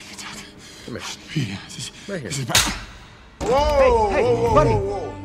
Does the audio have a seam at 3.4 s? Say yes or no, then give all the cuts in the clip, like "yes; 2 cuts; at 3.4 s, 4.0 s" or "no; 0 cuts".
yes; 1 cut; at 3.4 s